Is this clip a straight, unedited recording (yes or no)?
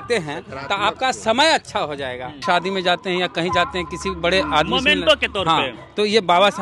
no